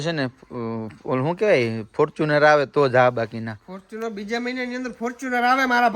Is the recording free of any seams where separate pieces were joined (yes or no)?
yes